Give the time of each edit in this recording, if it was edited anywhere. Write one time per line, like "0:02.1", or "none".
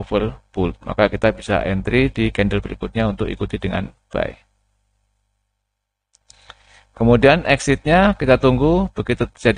none